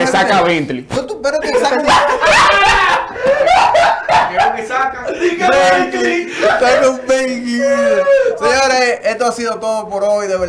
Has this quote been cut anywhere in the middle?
no; 0 cuts

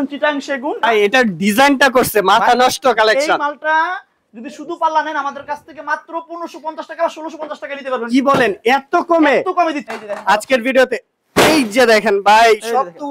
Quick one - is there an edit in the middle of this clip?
yes; 2 cuts; at 0.8 s, 9.9 s

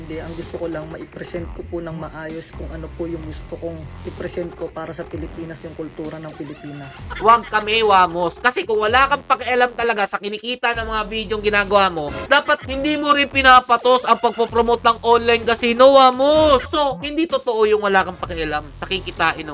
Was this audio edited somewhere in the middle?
yes; 4 cuts; at 4.0 s, 7.0 s, 12.2 s, 16.7 s

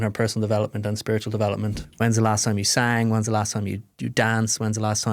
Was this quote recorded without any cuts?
no; 1 cut; at 1.8 s

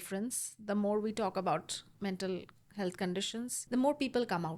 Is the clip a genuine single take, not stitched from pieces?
no; 2 cuts; at 1.8 s, 3.6 s

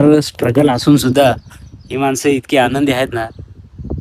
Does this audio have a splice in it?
no; 0 cuts

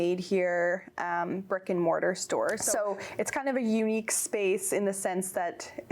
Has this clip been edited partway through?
yes; 1 cut; at 2.6 s

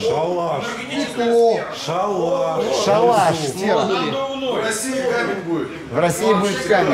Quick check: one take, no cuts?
yes; 0 cuts

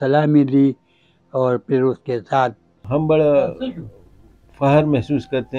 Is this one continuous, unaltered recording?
no; 1 cut; at 2.8 s

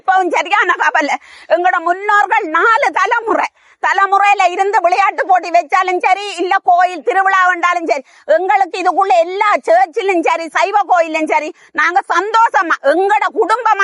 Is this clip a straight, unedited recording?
yes; 0 cuts

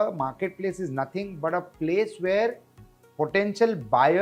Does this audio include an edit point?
no; 0 cuts

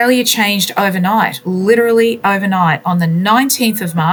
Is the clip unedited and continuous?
yes; 0 cuts

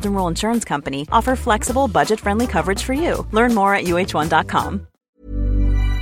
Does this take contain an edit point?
yes; 1 cut; at 5.0 s

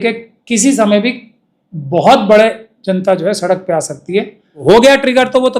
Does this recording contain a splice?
yes; 1 cut; at 4.6 s

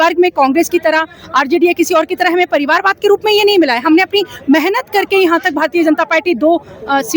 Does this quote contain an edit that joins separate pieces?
no; 0 cuts

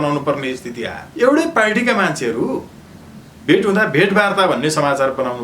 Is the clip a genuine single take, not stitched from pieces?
no; 1 cut; at 1.0 s

